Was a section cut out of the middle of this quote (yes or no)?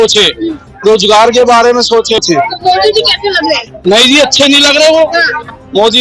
yes